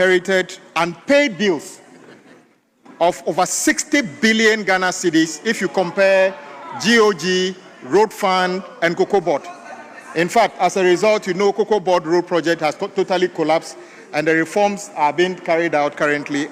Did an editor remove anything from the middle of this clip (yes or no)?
no